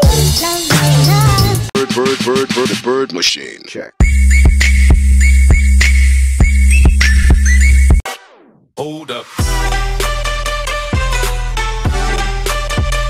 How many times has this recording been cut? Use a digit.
0